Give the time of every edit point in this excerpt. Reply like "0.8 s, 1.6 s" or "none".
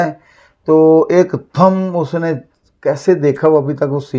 none